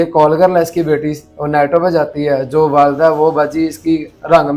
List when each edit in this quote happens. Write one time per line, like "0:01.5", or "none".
none